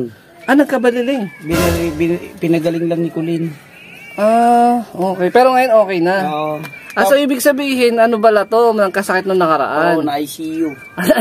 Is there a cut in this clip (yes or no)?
no